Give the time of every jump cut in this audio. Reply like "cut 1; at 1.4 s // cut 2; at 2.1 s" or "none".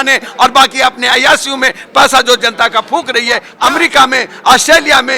cut 1; at 3.5 s